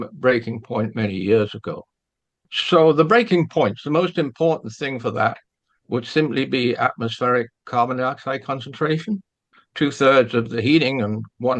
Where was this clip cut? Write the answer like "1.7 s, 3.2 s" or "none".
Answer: 9.4 s

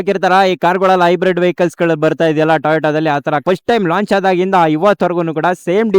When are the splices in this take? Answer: 3.4 s

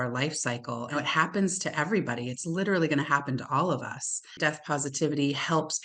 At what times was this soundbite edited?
0.9 s, 4.4 s

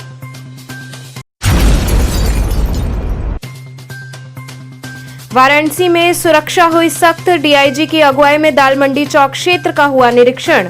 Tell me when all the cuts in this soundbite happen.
1.2 s, 4.9 s

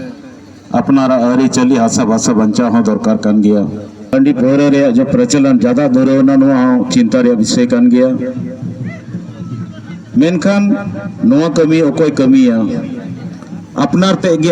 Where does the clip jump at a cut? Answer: 4.1 s

